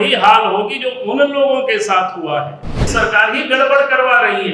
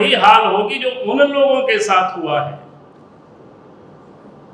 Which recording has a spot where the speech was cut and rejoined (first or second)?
first